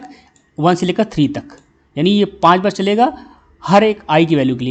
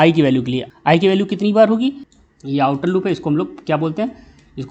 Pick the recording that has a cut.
second; 1 cut; at 2.1 s

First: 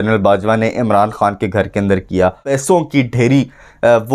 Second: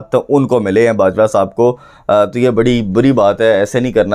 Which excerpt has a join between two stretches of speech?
first; 1 cut; at 2.5 s

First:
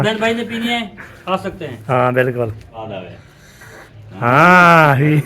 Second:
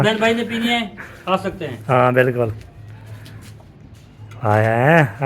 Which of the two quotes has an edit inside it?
first; 1 cut; at 2.8 s

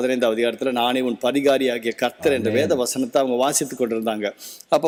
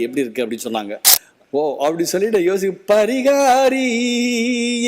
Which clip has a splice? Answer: second; 1 cut; at 1.2 s

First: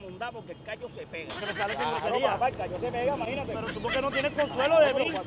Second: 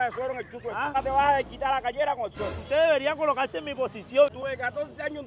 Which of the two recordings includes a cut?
second; 3 cuts; at 0.9 s, 2.5 s, 4.4 s

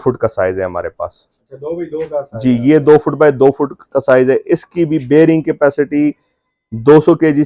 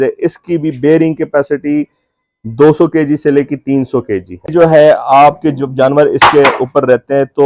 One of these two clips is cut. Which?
second; 1 cut; at 4.5 s

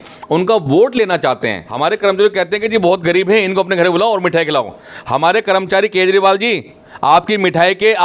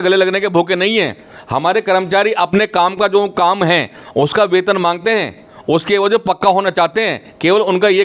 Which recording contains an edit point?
first; 1 cut; at 1.6 s

